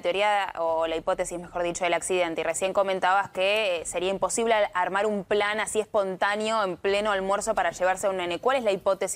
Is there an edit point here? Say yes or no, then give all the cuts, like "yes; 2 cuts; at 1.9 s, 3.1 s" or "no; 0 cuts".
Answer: no; 0 cuts